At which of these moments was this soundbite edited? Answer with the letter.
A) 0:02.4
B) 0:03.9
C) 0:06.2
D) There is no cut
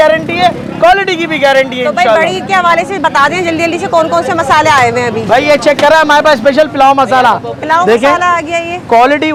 D